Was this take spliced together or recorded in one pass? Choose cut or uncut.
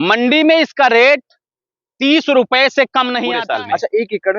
cut